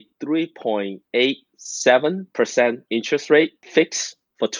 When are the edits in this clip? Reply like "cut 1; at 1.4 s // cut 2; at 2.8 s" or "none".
cut 1; at 1.0 s // cut 2; at 2.2 s // cut 3; at 3.6 s

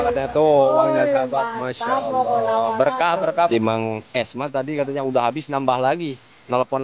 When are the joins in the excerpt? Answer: cut 1; at 3.5 s

